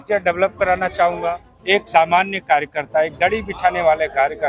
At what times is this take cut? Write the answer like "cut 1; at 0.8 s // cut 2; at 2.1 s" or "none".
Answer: cut 1; at 1.2 s

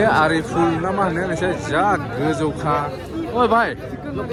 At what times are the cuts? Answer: none

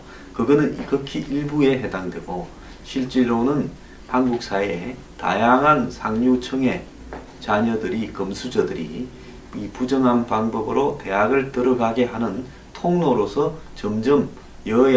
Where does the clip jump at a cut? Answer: none

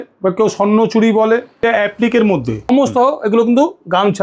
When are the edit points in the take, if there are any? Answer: cut 1; at 1.6 s // cut 2; at 2.7 s

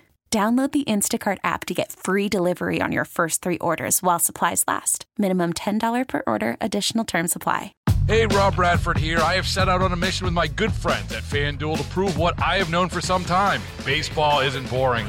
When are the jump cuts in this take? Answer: cut 1; at 7.7 s

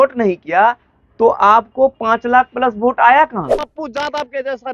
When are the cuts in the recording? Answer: cut 1; at 3.6 s

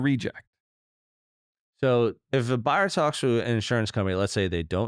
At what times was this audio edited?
cut 1; at 2.3 s

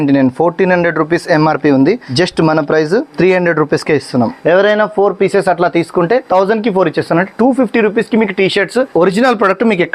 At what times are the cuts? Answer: cut 1; at 2.1 s // cut 2; at 3.1 s // cut 3; at 4.4 s // cut 4; at 6.2 s // cut 5; at 8.9 s

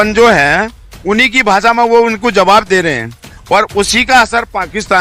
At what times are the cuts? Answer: none

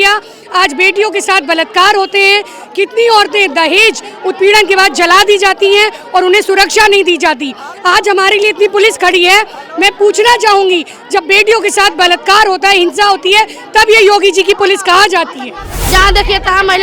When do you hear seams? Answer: cut 1; at 15.7 s

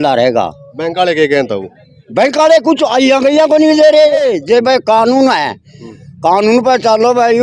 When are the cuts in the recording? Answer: cut 1; at 4.3 s

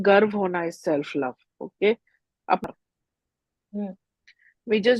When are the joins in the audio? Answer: cut 1; at 2.6 s

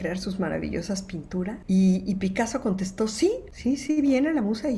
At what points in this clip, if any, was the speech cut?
cut 1; at 1.6 s // cut 2; at 3.5 s

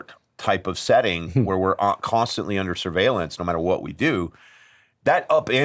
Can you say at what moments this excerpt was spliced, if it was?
none

